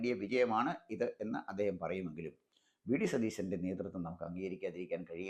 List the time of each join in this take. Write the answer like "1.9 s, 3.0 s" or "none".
none